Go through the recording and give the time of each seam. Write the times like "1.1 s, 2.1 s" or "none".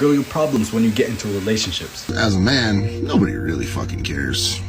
2.1 s

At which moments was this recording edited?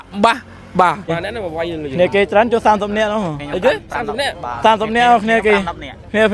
1.1 s

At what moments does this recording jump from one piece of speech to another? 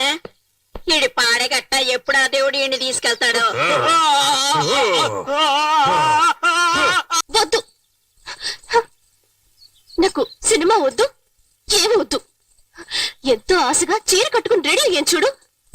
7.2 s

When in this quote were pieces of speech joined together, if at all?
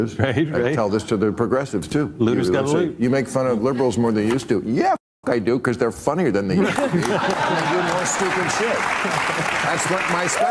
none

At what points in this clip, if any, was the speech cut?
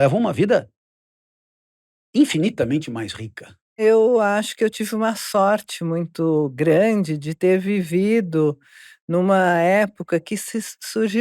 3.8 s

